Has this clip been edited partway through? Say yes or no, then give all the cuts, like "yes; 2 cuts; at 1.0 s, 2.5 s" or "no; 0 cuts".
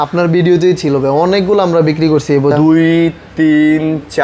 yes; 1 cut; at 2.5 s